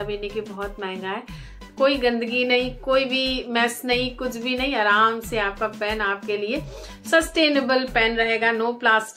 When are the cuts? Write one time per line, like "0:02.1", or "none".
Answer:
0:01.6